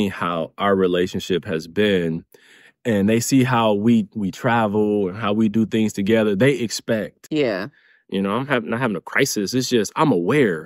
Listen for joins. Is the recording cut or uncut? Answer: cut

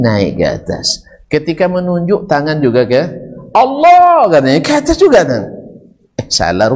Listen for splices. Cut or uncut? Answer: uncut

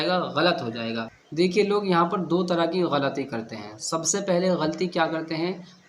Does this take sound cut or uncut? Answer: cut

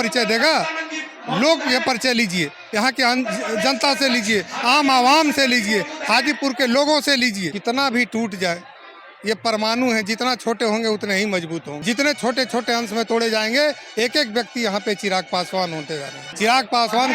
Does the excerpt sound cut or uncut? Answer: cut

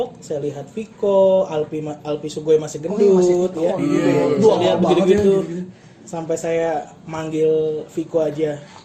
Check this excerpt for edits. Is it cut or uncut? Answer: uncut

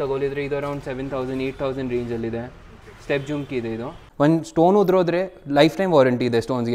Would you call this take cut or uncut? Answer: cut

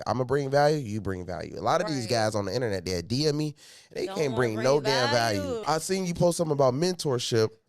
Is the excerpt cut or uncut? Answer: cut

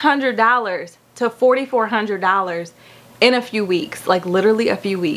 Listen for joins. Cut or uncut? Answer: uncut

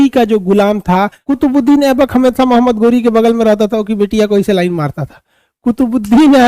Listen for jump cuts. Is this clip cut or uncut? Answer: cut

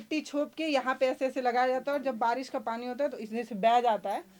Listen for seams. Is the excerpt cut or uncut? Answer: uncut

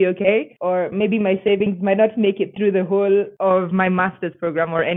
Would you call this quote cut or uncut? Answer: uncut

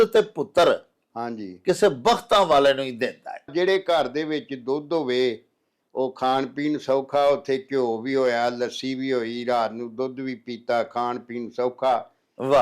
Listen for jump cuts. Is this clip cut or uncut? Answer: cut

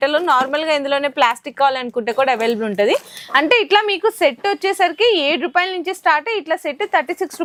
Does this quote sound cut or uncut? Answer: uncut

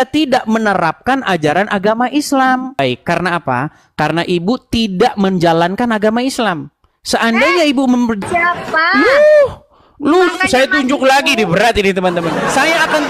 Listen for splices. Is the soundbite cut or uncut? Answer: cut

